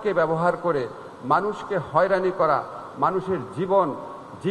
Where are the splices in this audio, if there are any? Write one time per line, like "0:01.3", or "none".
none